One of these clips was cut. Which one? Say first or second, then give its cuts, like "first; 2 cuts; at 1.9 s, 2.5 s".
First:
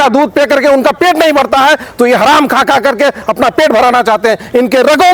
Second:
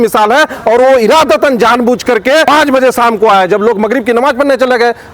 second; 1 cut; at 2.5 s